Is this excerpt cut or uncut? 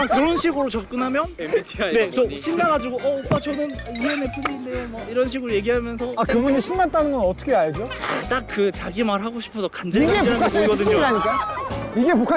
uncut